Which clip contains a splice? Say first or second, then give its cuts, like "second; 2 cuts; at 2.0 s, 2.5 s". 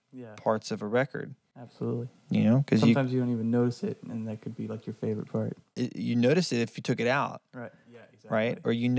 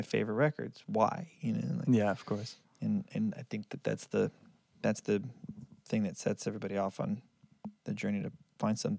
first; 1 cut; at 5.6 s